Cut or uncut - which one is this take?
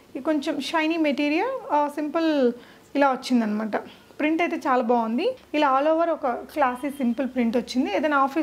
cut